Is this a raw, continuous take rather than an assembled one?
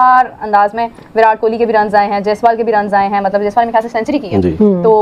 yes; 0 cuts

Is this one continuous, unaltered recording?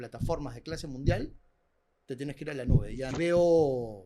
no; 1 cut; at 3.1 s

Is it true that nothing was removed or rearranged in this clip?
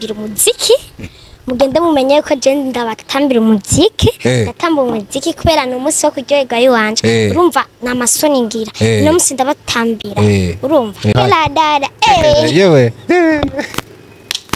no; 1 cut; at 11.2 s

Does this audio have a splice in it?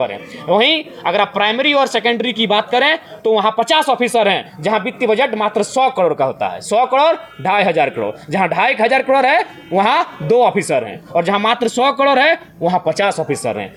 no; 0 cuts

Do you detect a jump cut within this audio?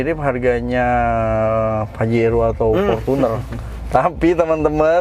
no; 0 cuts

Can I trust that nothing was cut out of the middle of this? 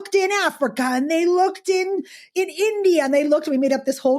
no; 1 cut; at 2.3 s

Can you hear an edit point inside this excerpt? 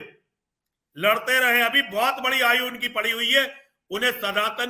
no; 0 cuts

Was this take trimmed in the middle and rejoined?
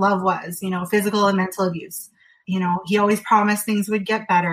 yes; 1 cut; at 2.4 s

